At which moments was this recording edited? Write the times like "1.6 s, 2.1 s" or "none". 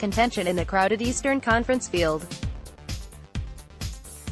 2.9 s